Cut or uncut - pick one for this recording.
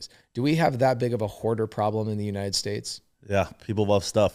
uncut